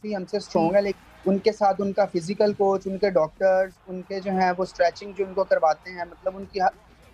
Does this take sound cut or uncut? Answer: cut